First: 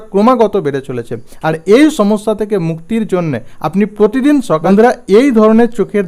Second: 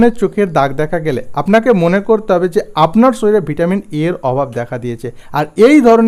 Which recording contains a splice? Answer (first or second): first